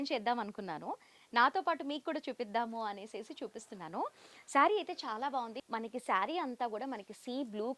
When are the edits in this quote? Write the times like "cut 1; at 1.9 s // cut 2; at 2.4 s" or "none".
cut 1; at 5.6 s